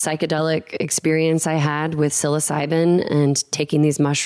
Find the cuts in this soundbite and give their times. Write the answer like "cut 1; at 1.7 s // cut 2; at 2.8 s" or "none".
none